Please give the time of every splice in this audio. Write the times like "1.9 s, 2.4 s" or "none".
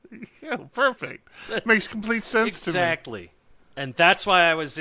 3.9 s